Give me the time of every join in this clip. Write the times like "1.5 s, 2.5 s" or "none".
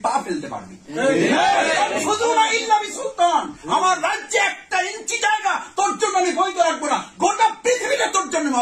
none